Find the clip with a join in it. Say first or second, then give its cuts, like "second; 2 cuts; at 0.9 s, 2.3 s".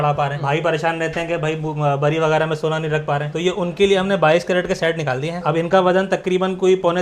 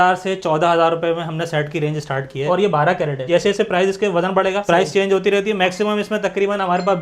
second; 2 cuts; at 2.4 s, 3.3 s